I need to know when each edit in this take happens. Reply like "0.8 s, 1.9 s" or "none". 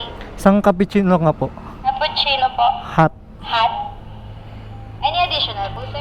none